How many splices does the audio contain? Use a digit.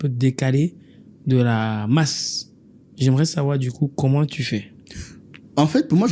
0